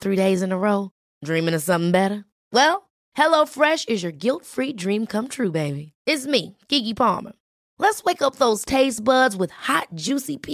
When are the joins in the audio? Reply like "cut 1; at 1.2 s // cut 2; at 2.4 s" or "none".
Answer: none